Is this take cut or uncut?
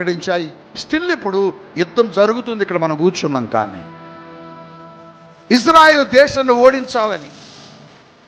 uncut